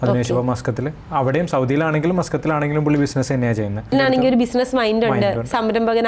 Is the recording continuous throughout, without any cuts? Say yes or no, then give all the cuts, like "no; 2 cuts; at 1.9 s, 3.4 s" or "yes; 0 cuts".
no; 1 cut; at 3.9 s